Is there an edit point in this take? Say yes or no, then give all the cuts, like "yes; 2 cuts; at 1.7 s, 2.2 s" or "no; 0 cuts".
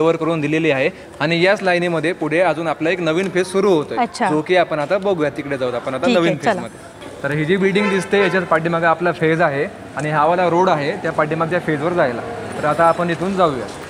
no; 0 cuts